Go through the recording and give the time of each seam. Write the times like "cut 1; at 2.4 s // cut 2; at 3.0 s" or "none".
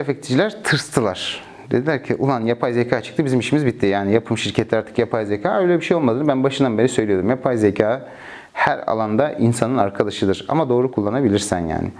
none